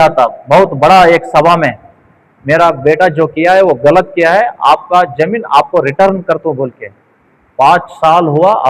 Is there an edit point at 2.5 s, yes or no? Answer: no